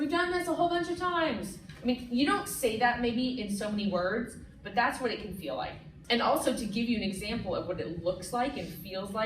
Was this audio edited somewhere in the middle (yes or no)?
yes